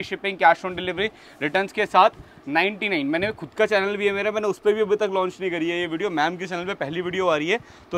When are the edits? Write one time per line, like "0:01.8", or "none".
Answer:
none